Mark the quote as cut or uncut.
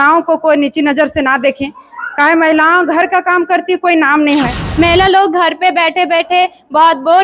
cut